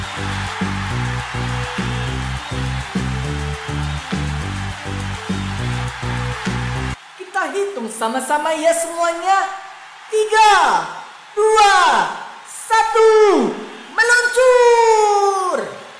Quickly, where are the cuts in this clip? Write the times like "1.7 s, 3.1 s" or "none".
6.9 s